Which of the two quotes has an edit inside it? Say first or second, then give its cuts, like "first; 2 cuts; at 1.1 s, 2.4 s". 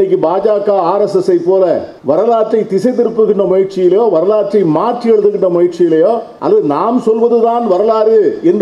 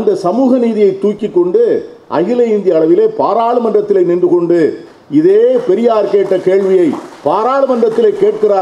first; 2 cuts; at 1.9 s, 6.3 s